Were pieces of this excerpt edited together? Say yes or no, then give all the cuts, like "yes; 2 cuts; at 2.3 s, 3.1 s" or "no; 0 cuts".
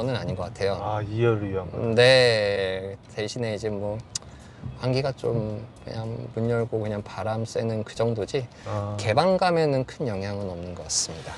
no; 0 cuts